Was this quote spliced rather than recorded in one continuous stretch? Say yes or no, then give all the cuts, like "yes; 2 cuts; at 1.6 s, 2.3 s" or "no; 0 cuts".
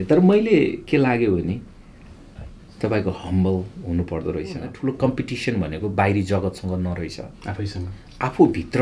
yes; 1 cut; at 4.7 s